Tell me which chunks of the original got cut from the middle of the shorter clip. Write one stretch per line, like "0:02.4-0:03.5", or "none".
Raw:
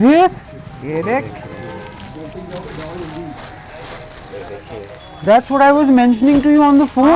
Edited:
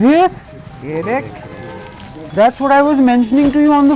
0:02.1-0:05.0